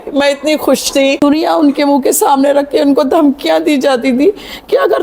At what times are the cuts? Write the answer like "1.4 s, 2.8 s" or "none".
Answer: 1.2 s

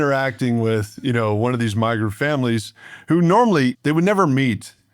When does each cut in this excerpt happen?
3.8 s

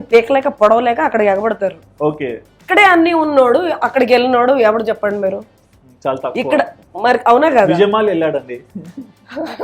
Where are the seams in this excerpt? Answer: 2.6 s

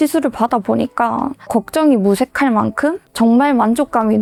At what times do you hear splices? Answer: none

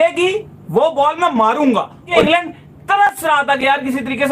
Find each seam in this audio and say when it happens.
2.2 s

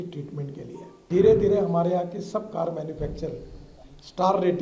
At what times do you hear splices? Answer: 1.0 s

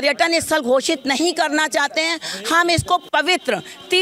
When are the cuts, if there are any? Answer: none

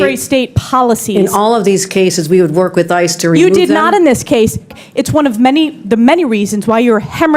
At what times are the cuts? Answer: 4.7 s

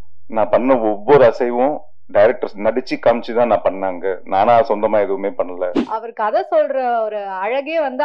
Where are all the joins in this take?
5.8 s

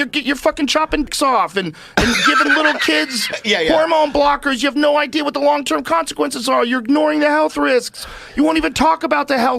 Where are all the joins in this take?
1.1 s

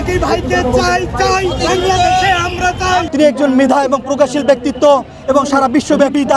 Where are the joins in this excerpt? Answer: none

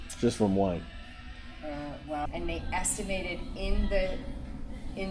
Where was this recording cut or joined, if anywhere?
2.3 s

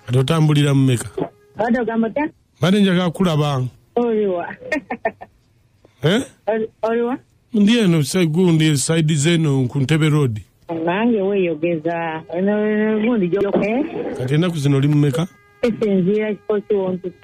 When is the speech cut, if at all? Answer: 1.4 s, 13.4 s

